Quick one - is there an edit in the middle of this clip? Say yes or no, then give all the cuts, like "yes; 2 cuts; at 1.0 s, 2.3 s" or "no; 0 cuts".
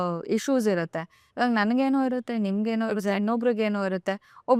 no; 0 cuts